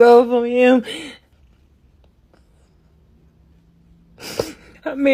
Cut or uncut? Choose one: cut